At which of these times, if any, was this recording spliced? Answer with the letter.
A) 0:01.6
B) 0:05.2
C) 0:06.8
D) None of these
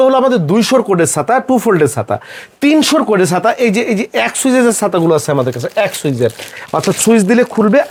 D